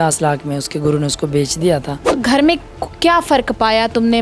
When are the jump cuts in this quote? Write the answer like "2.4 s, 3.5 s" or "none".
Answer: 2.1 s

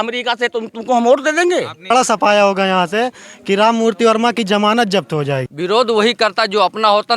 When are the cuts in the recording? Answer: 1.9 s, 5.5 s

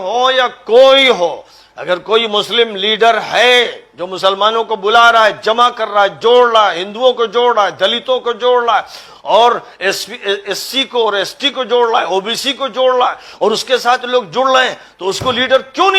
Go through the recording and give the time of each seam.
none

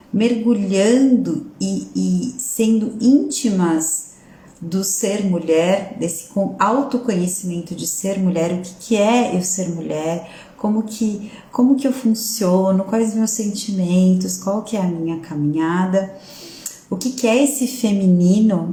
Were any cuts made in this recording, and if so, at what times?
none

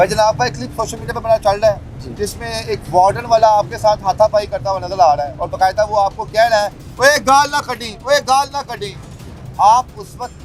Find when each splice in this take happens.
none

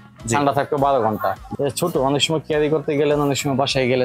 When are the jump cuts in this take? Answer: 1.4 s

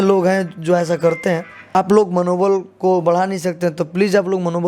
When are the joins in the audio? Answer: 1.8 s

